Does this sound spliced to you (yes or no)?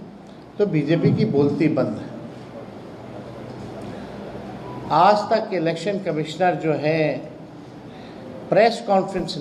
no